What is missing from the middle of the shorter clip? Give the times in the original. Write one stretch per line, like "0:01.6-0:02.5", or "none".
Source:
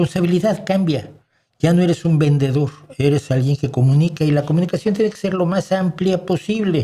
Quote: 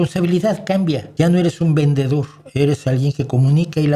0:01.1-0:01.5